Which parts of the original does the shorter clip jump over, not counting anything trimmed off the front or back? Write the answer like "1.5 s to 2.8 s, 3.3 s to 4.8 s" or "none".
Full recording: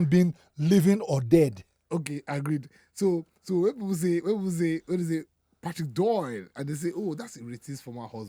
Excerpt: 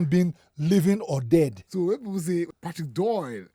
1.6 s to 3.4 s, 4.2 s to 5.5 s